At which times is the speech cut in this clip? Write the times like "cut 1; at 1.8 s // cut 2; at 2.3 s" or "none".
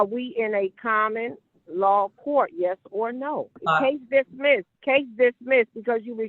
cut 1; at 3.6 s // cut 2; at 4.7 s